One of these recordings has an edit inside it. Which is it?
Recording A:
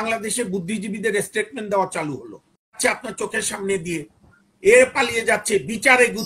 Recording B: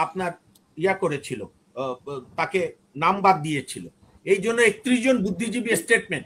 A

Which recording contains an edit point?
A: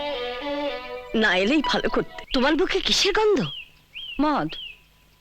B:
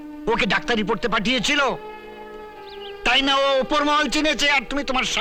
A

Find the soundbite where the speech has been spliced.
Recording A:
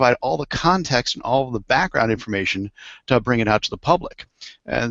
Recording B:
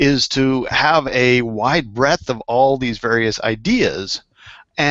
B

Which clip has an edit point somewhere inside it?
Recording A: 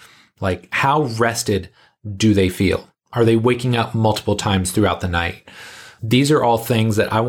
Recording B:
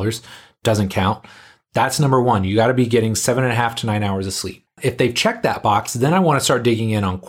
B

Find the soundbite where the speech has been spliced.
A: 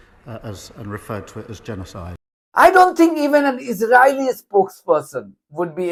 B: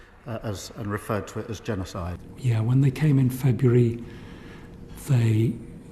B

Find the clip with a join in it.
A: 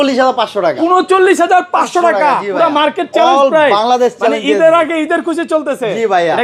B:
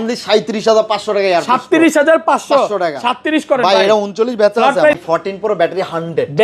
B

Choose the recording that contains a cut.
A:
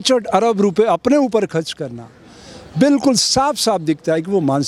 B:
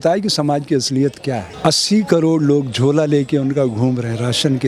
B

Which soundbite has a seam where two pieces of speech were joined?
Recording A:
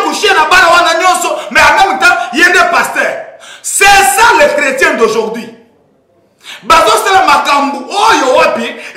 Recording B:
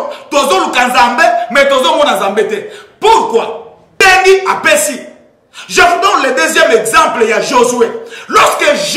B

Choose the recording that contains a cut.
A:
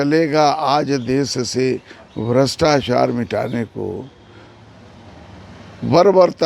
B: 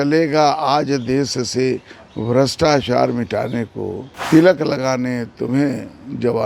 B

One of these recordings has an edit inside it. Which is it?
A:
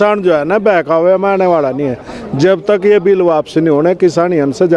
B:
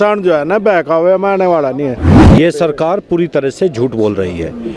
B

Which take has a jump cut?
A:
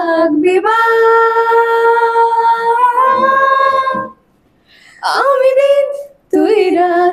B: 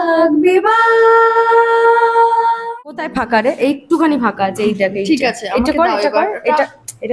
B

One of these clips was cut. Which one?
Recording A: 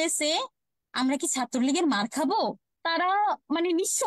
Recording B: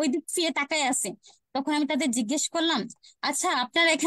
A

